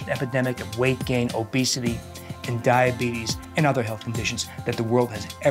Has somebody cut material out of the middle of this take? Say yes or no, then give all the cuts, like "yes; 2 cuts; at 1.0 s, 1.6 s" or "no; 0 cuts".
no; 0 cuts